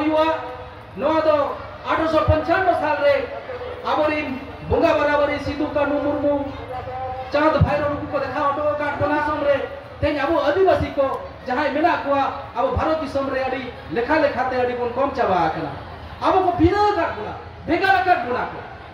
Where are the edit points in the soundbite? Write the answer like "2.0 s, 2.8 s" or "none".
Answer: 9.3 s

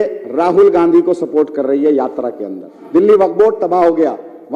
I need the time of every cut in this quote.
2.7 s

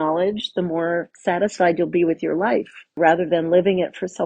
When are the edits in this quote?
3.0 s

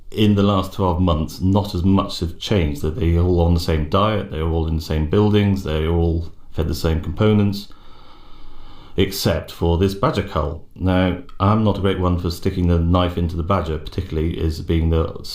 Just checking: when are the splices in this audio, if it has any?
14.4 s

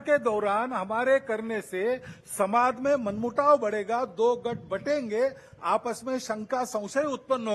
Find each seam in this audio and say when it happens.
none

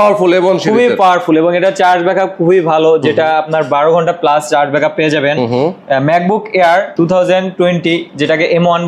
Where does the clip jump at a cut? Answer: none

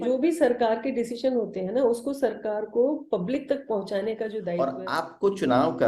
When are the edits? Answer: 4.5 s

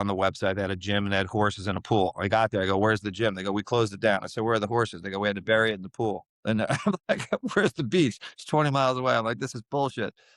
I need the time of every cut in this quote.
none

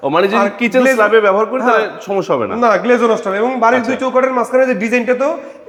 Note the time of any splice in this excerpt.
none

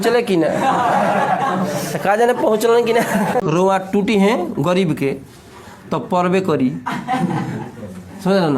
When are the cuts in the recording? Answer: 3.4 s

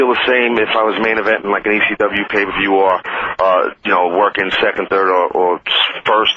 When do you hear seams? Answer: none

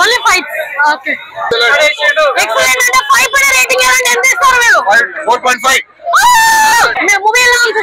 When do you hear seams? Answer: 1.5 s, 6.9 s

